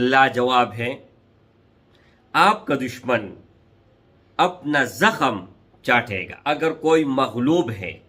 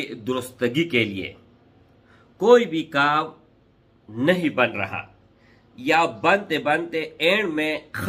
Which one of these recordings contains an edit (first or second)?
first